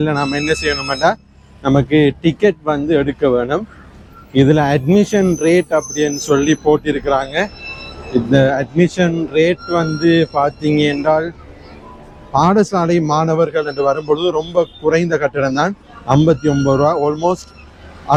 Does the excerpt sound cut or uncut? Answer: uncut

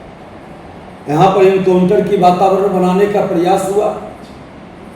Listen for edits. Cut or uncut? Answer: uncut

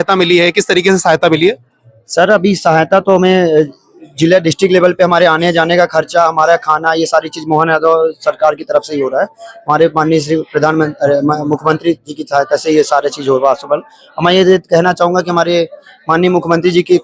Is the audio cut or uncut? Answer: uncut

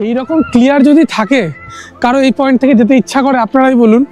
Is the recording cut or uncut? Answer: uncut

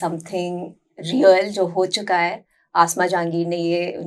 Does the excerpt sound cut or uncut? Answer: uncut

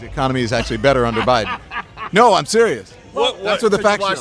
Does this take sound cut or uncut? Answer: uncut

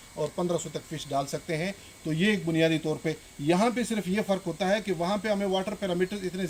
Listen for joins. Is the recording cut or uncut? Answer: uncut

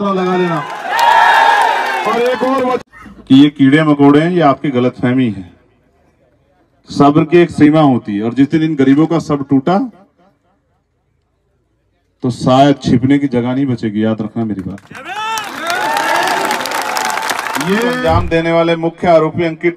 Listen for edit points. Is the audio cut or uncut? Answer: cut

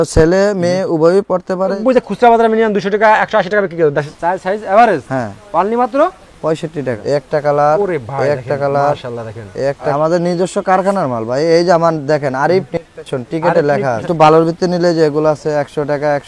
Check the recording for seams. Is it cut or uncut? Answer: cut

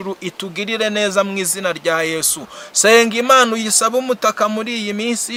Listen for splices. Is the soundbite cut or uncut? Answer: uncut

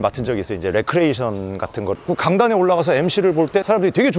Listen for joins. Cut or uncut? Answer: cut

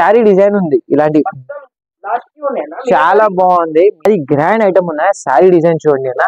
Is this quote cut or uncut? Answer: cut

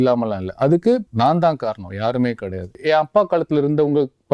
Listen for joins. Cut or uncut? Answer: cut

